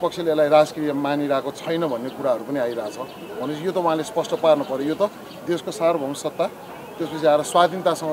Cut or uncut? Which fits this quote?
uncut